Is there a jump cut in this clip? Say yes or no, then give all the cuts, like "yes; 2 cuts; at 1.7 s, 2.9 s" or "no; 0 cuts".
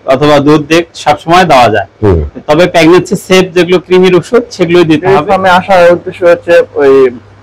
yes; 1 cut; at 5.0 s